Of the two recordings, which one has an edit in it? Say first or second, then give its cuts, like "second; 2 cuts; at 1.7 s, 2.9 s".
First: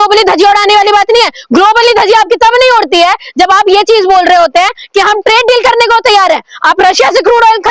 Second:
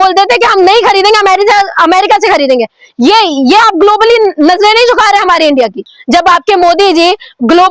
second; 1 cut; at 5.9 s